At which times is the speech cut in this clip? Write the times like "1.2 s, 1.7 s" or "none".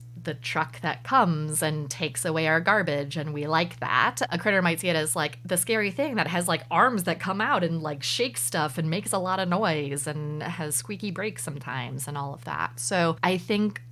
4.3 s, 13.2 s